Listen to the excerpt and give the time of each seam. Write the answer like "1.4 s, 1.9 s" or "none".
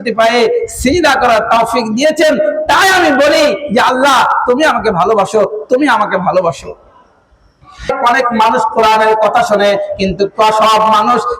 7.9 s